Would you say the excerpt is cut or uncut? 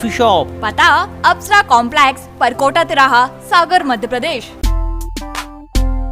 cut